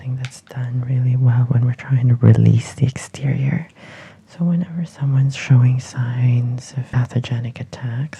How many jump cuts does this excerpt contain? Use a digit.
1